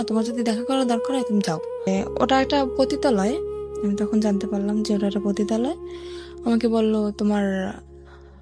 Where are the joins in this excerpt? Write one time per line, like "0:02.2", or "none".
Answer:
0:01.9

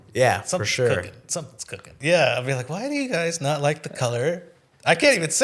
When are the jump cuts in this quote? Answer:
0:01.9

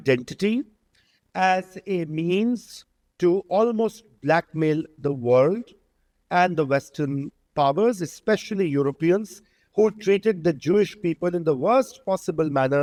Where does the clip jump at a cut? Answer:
none

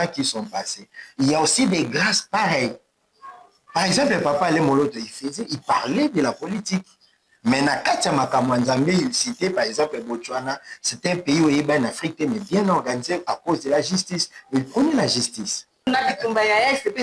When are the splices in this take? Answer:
0:15.9

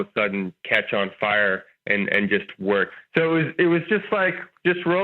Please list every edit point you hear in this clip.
0:02.9

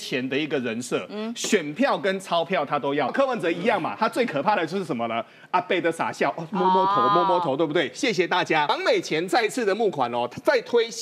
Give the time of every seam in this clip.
0:03.1
0:08.7

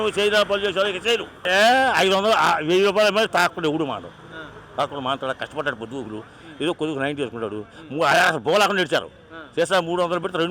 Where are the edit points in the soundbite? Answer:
0:01.4

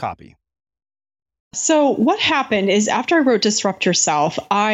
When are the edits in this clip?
0:01.6

